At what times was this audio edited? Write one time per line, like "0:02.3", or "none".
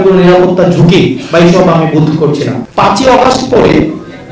0:02.6